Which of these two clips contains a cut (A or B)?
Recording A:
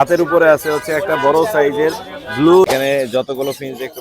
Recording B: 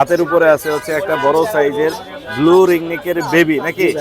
A